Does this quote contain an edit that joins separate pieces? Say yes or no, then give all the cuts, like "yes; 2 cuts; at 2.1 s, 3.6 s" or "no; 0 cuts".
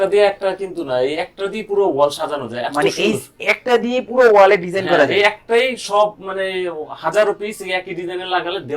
no; 0 cuts